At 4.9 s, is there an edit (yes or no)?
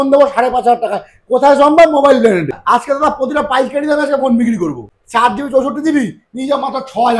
yes